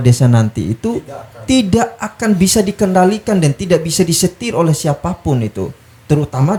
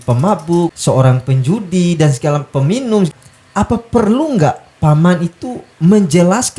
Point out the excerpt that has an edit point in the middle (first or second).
second